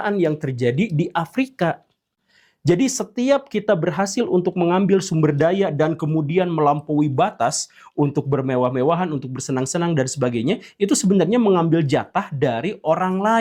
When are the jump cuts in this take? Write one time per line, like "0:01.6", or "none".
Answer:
none